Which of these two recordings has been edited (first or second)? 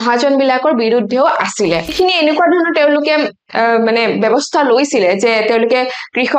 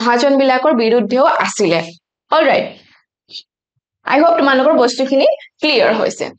first